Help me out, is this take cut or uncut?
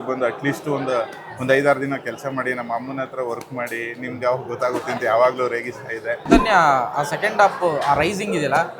cut